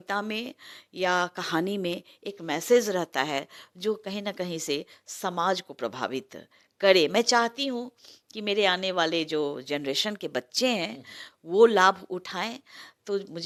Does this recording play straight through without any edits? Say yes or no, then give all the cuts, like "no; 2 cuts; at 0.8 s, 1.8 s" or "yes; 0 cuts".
yes; 0 cuts